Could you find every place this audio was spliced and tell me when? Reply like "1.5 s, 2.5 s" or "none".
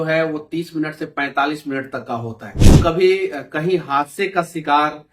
2.8 s